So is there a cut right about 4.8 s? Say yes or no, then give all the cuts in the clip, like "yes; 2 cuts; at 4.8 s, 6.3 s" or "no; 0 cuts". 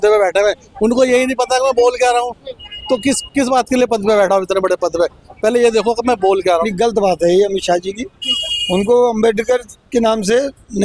no; 1 cut; at 6.7 s